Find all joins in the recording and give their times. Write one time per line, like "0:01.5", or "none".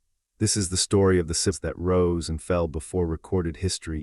0:01.6